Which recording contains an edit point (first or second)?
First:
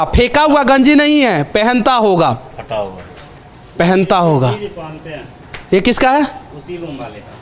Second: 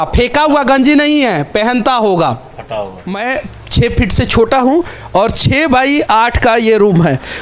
second